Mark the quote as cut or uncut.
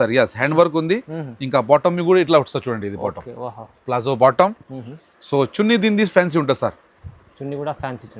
uncut